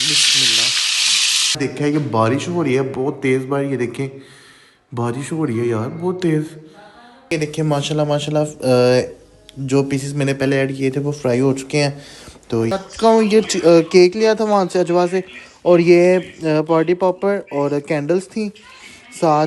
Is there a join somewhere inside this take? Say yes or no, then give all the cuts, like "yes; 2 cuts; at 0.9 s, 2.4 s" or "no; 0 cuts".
yes; 3 cuts; at 1.5 s, 7.3 s, 12.7 s